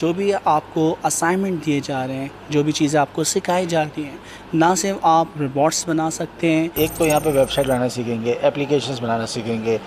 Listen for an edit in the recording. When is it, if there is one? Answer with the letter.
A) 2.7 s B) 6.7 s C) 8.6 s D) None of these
B